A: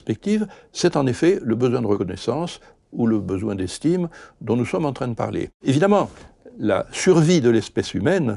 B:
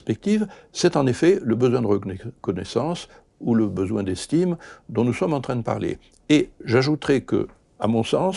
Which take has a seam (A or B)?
A